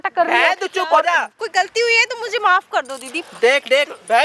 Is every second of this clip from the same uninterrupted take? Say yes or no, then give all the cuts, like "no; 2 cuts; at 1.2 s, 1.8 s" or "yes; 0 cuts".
no; 1 cut; at 1.4 s